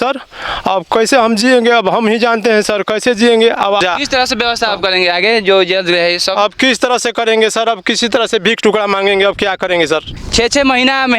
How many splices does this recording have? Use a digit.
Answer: 2